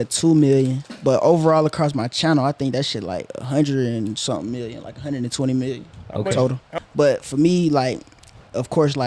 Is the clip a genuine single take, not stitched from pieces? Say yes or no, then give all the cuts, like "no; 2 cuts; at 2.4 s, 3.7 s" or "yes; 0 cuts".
no; 1 cut; at 6.7 s